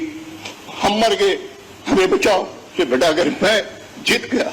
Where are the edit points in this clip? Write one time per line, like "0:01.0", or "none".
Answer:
0:02.6